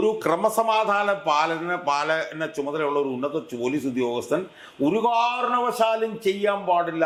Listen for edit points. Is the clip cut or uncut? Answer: uncut